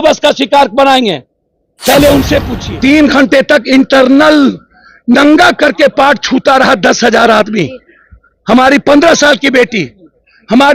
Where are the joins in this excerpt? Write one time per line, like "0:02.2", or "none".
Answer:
0:02.6